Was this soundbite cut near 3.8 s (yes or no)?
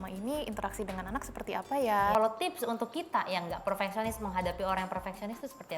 no